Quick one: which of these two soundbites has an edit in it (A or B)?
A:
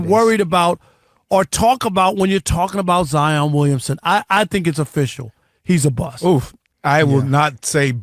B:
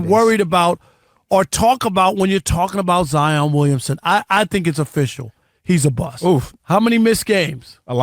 B